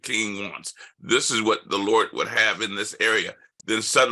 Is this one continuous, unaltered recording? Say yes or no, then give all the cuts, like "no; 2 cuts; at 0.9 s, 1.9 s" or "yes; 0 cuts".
yes; 0 cuts